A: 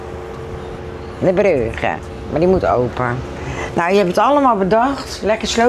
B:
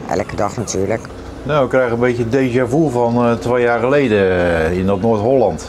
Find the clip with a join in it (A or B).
B